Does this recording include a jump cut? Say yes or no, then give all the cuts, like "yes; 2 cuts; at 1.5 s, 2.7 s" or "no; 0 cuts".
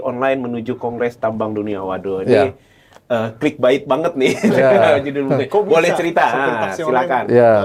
no; 0 cuts